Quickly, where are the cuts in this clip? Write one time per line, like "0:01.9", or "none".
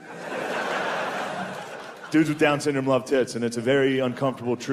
none